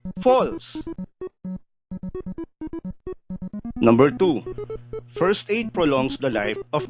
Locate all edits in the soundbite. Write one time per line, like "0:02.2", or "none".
0:01.7

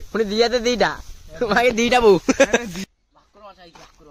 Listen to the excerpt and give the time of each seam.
0:02.8

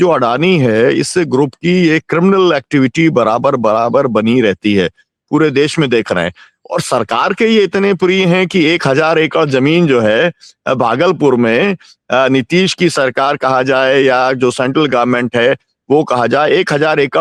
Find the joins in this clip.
none

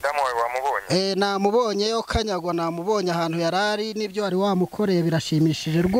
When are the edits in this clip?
none

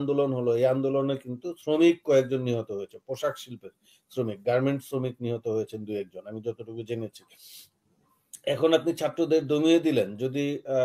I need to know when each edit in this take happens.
none

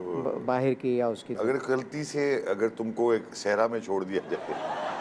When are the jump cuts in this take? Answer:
0:01.3

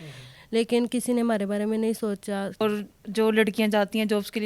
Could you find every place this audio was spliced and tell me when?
0:02.5

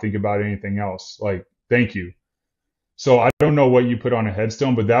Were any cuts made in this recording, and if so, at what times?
none

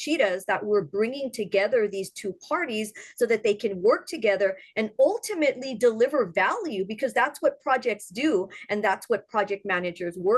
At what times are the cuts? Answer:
none

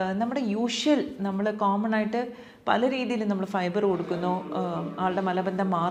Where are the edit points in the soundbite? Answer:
none

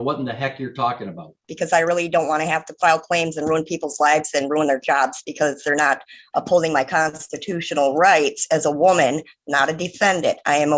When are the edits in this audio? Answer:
0:01.5

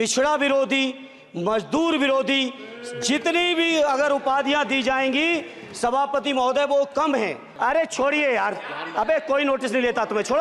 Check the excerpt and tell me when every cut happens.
0:07.4

